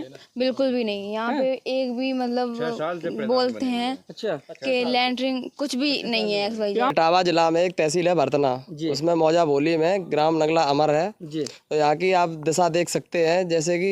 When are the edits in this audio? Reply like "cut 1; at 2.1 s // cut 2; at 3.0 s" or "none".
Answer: cut 1; at 6.9 s